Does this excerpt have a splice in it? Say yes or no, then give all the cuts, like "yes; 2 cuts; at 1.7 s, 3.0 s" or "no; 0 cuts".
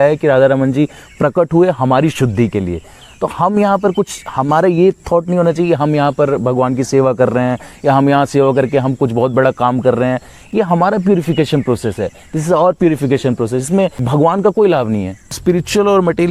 yes; 2 cuts; at 14.0 s, 15.4 s